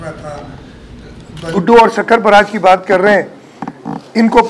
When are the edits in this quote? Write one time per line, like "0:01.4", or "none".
0:01.5